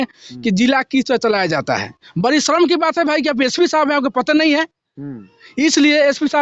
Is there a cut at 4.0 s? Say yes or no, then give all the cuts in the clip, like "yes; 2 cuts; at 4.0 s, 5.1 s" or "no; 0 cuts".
no; 0 cuts